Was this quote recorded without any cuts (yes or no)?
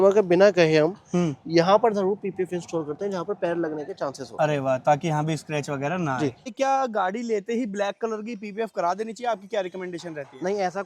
no